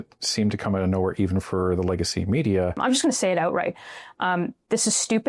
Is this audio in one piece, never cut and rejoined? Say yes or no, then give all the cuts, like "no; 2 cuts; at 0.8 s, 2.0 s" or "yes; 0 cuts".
no; 1 cut; at 2.8 s